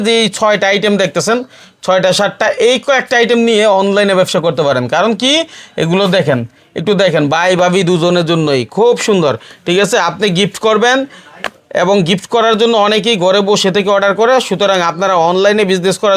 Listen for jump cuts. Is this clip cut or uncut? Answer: uncut